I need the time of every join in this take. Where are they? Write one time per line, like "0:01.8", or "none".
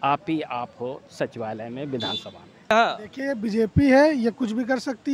0:02.7

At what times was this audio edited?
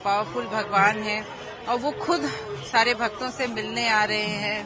none

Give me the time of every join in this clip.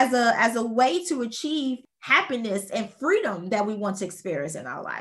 0:01.9

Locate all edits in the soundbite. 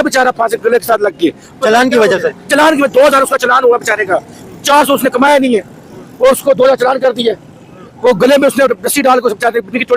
none

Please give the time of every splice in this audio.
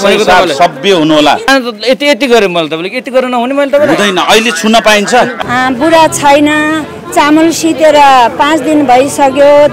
0:01.5
0:05.3

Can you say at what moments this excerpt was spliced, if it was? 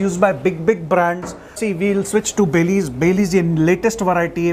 0:01.6

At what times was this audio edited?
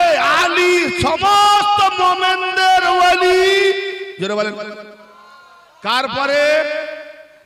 none

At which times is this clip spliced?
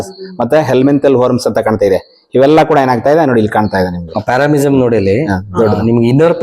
none

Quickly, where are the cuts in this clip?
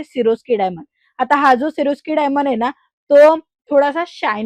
none

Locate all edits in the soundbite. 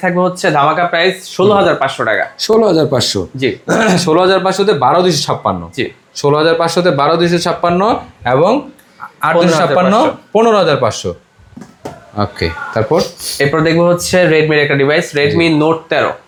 none

